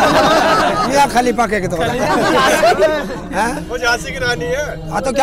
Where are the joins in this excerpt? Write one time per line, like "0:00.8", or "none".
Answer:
none